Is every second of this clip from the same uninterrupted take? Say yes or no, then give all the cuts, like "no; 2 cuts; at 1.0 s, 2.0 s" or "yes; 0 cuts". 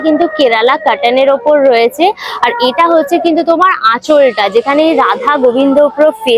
yes; 0 cuts